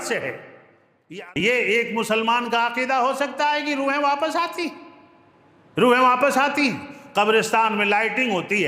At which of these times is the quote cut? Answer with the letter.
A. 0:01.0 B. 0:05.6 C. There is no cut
A